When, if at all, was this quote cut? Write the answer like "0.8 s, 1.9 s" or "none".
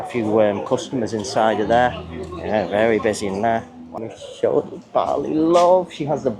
3.9 s